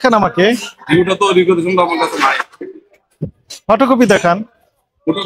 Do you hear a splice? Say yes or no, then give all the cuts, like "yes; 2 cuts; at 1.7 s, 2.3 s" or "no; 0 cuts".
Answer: no; 0 cuts